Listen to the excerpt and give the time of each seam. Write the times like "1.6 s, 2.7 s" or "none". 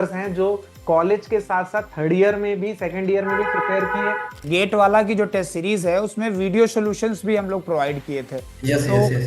4.4 s